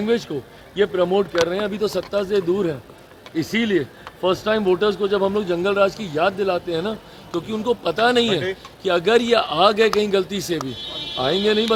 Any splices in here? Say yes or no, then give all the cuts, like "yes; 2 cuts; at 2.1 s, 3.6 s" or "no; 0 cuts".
no; 0 cuts